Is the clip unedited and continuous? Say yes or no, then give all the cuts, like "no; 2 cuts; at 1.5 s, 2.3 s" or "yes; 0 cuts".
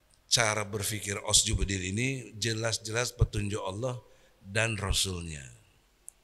yes; 0 cuts